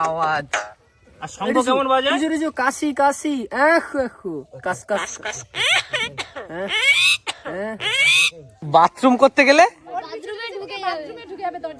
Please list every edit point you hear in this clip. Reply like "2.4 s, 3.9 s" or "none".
8.5 s